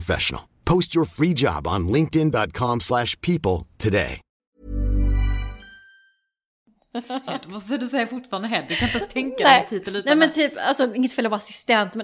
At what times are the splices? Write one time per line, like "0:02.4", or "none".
0:04.5
0:06.7